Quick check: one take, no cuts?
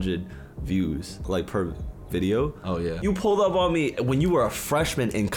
no; 2 cuts; at 1.2 s, 3.0 s

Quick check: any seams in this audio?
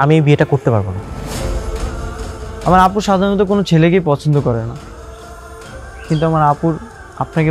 yes; 2 cuts; at 1.0 s, 2.6 s

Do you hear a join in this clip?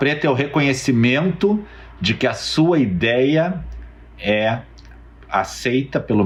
no; 0 cuts

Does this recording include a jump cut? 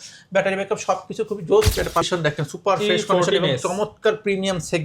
yes; 1 cut; at 2.1 s

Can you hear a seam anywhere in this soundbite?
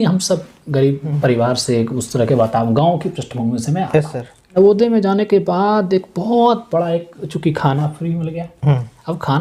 yes; 2 cuts; at 1.1 s, 4.6 s

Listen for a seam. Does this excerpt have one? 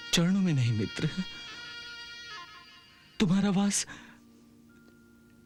no; 0 cuts

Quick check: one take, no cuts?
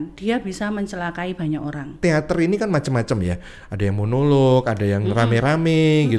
no; 1 cut; at 2.0 s

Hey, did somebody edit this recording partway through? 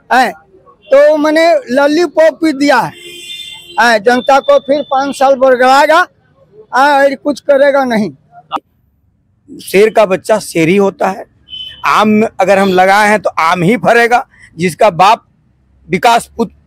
yes; 1 cut; at 8.6 s

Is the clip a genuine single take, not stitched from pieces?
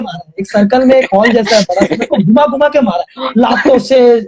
yes; 0 cuts

